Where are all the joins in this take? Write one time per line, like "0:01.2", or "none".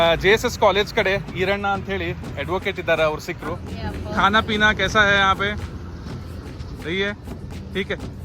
0:03.7